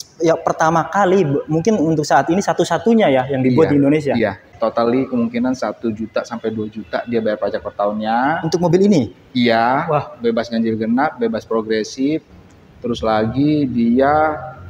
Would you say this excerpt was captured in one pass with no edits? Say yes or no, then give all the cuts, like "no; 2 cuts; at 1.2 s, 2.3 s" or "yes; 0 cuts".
no; 1 cut; at 4.5 s